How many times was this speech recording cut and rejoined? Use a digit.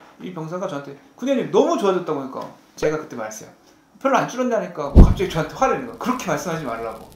1